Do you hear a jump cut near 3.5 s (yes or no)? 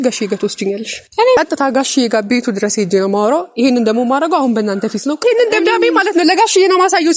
no